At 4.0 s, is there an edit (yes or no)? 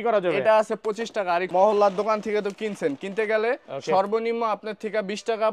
no